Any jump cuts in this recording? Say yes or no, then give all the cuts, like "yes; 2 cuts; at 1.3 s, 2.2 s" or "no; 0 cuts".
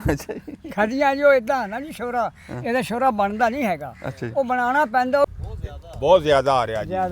yes; 1 cut; at 5.2 s